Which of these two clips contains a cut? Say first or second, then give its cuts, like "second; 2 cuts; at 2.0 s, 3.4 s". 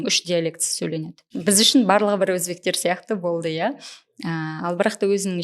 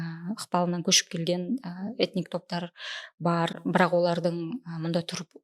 first; 1 cut; at 1.4 s